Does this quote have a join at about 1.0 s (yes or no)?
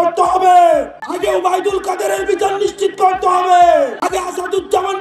yes